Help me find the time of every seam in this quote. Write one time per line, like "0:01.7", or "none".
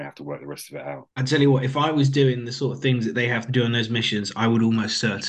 0:01.1